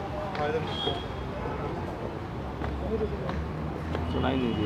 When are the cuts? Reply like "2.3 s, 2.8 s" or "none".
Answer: none